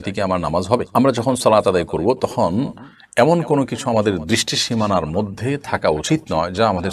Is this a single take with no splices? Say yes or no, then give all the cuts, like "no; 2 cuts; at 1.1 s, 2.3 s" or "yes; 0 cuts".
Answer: yes; 0 cuts